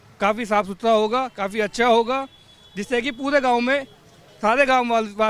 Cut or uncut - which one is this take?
uncut